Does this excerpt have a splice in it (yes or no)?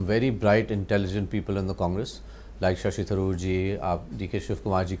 no